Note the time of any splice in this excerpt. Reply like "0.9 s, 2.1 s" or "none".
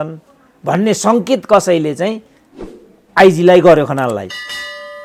none